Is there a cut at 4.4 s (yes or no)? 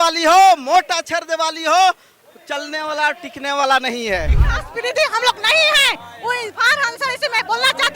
yes